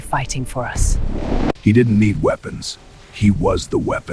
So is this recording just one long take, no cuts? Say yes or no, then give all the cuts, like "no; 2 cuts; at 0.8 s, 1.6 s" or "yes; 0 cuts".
yes; 0 cuts